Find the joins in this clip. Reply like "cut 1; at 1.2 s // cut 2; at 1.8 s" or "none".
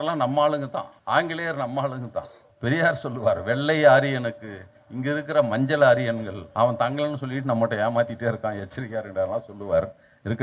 cut 1; at 0.9 s // cut 2; at 2.4 s // cut 3; at 6.4 s